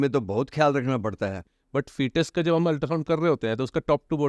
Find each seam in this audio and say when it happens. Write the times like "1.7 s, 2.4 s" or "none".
1.4 s

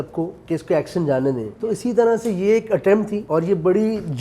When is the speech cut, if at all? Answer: 1.5 s, 3.2 s

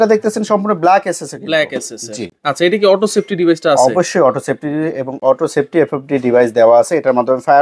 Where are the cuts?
none

